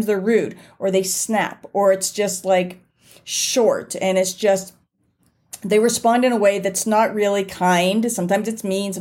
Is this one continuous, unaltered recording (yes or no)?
yes